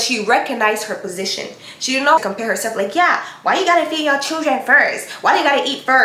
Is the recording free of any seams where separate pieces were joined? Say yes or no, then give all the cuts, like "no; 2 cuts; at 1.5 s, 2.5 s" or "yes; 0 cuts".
no; 1 cut; at 2.2 s